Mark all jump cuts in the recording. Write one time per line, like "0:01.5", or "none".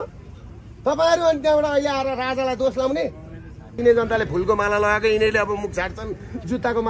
0:03.8